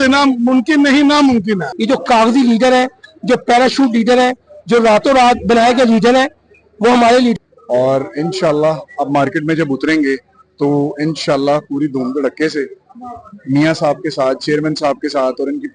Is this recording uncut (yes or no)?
no